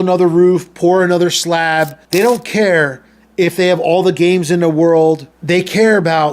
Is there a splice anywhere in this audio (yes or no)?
yes